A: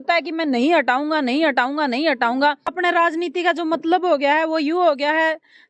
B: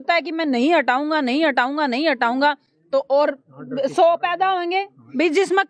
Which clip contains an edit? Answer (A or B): A